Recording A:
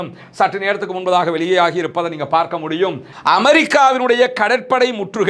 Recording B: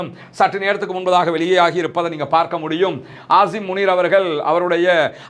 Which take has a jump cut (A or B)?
A